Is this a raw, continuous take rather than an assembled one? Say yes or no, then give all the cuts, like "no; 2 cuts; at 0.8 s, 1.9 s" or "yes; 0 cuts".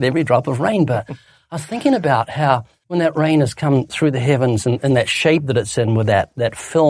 no; 1 cut; at 2.8 s